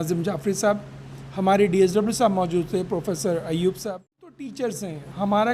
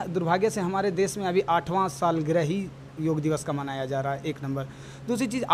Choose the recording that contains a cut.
first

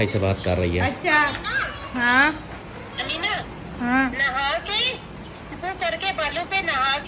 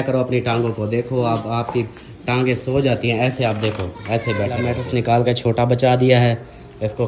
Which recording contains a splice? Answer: second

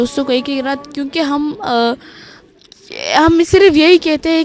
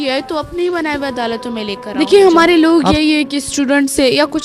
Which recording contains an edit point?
second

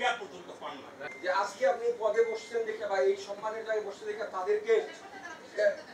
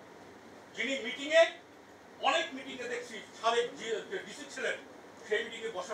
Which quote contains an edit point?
first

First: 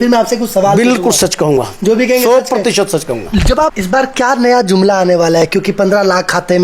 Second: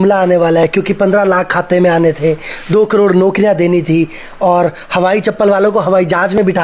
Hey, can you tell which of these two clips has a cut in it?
first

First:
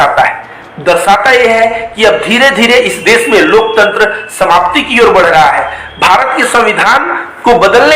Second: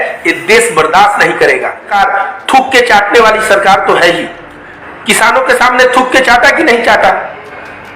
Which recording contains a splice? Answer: second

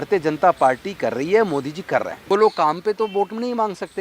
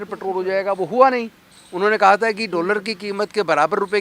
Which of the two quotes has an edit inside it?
first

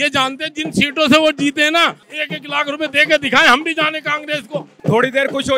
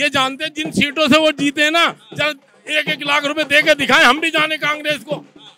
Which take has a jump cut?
first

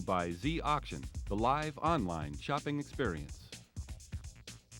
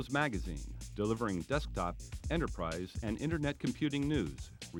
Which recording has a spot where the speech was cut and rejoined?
first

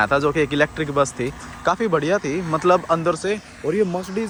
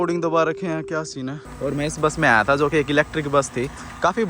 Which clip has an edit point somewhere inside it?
second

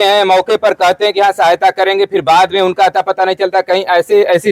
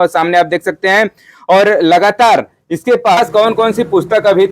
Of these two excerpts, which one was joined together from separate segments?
second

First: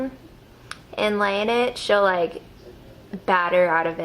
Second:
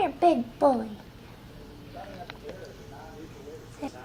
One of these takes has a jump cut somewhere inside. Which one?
first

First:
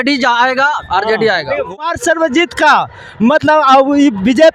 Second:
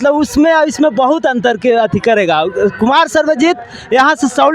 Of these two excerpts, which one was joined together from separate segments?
first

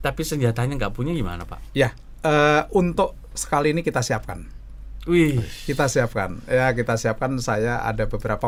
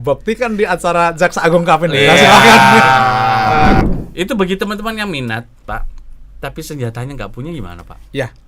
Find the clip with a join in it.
second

